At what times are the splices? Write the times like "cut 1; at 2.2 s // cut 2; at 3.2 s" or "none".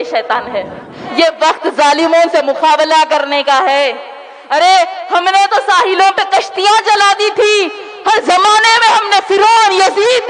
cut 1; at 1.0 s